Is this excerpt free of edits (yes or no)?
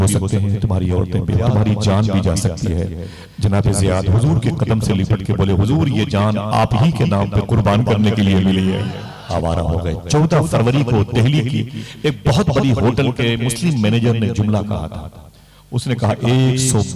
no